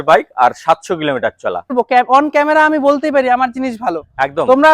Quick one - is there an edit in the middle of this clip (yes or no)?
yes